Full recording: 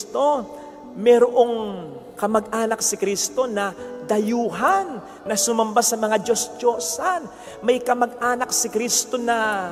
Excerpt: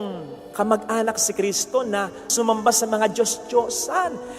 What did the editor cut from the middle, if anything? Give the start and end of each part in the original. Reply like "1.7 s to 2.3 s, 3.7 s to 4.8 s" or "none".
3.9 s to 5.4 s